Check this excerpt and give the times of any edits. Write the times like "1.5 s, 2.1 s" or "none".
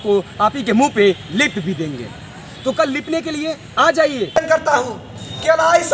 4.4 s